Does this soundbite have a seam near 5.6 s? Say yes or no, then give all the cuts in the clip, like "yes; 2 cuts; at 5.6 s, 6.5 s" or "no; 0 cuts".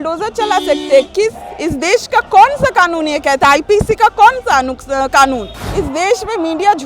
yes; 1 cut; at 5.6 s